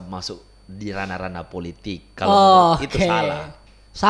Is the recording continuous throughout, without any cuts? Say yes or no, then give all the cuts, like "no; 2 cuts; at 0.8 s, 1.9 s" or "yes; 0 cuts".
yes; 0 cuts